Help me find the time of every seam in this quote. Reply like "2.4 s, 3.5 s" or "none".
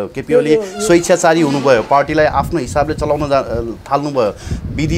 none